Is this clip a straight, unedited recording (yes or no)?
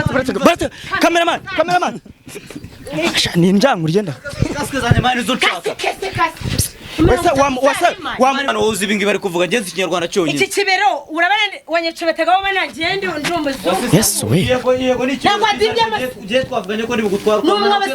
no